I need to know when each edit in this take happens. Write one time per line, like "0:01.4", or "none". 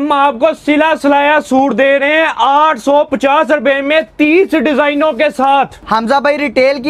0:05.8